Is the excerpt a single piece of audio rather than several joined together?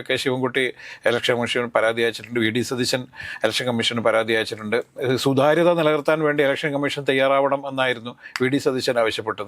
yes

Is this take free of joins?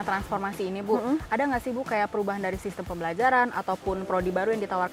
yes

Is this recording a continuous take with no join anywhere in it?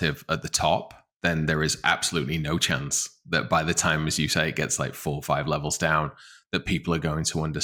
yes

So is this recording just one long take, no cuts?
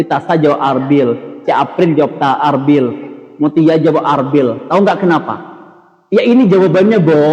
yes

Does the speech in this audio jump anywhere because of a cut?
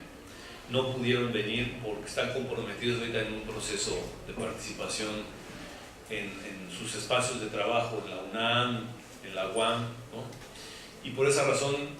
yes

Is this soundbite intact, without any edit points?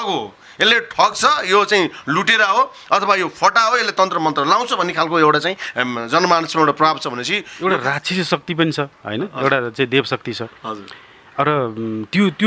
no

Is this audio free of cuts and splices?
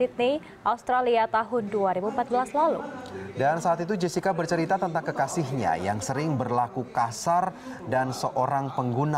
yes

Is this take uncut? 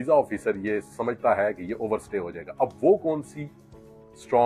yes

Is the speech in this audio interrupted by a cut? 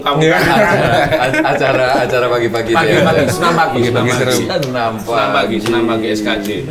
no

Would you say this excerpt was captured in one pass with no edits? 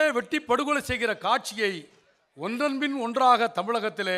yes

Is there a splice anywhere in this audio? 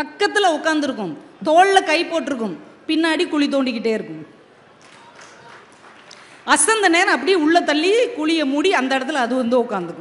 no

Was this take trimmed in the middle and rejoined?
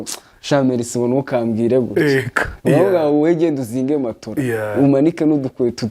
yes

